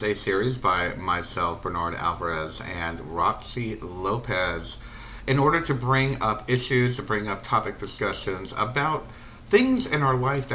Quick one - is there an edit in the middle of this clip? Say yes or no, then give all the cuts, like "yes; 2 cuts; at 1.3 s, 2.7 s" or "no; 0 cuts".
no; 0 cuts